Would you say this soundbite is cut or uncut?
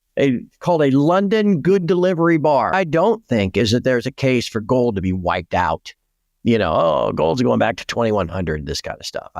cut